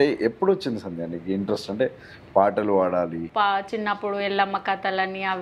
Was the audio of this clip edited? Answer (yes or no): yes